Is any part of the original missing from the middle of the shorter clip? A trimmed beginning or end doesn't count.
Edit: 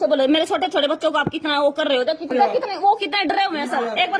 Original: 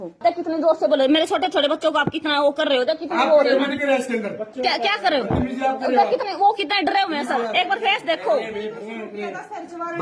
yes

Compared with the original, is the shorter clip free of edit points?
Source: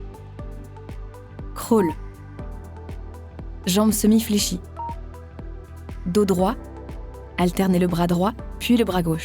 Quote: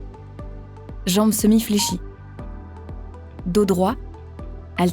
no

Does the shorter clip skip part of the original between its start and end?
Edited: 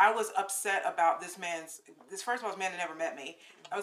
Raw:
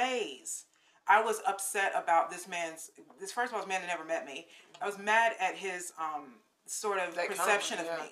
no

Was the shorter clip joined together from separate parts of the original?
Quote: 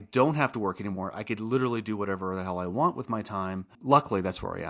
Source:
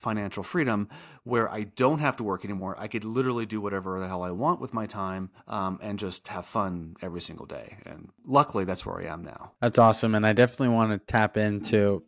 yes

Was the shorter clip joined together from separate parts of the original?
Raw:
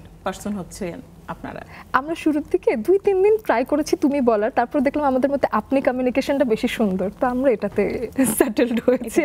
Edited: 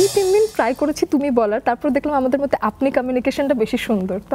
no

